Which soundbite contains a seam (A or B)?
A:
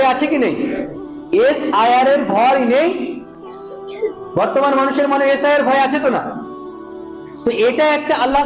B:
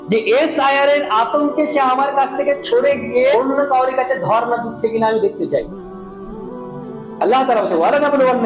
B